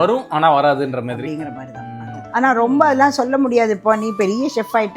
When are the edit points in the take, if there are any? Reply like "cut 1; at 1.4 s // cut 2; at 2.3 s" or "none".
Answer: cut 1; at 2.2 s